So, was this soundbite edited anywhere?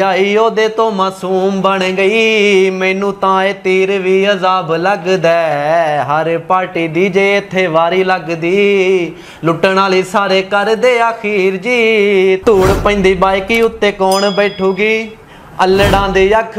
no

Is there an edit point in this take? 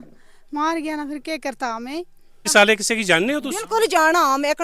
yes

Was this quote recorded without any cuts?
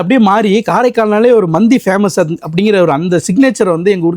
yes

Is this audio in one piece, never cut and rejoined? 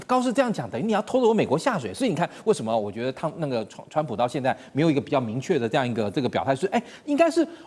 yes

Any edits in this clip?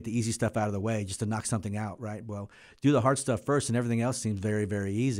no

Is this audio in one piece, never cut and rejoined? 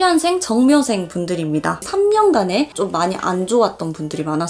no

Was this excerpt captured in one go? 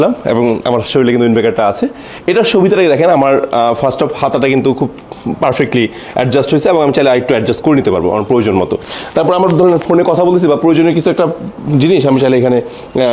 yes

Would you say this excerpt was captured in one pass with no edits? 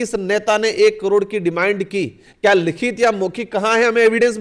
yes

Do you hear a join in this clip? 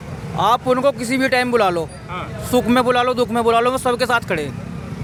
no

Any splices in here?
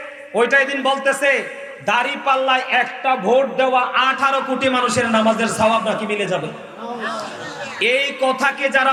no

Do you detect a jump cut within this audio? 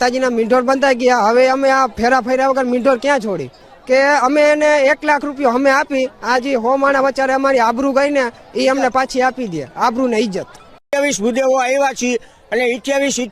yes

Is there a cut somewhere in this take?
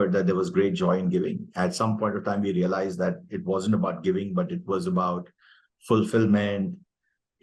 no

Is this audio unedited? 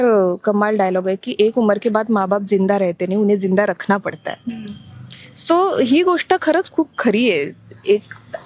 yes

